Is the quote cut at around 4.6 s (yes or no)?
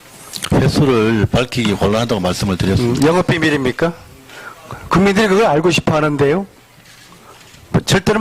no